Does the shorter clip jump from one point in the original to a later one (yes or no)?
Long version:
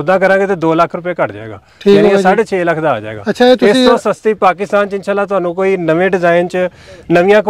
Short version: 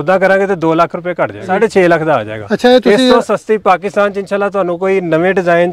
yes